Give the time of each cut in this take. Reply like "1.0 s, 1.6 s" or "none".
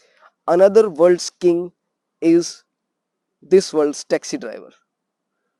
none